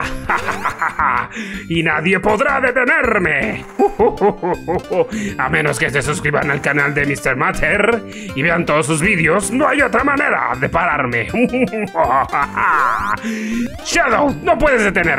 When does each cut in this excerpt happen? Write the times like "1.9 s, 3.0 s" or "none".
13.8 s